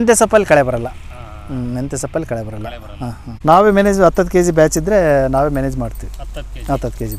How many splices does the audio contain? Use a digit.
1